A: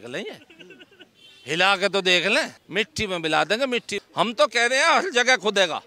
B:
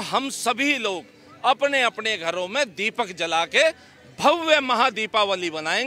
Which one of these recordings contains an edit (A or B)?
A